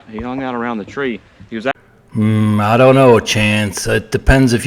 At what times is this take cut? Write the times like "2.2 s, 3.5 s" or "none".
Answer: 1.7 s